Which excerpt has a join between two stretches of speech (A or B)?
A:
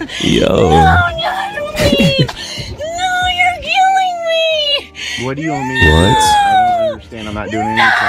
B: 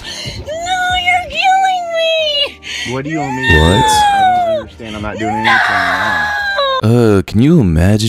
B